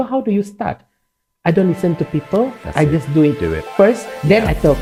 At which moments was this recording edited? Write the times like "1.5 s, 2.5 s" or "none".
none